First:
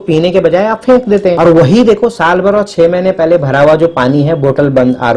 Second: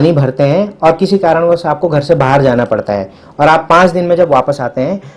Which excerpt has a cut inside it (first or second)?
first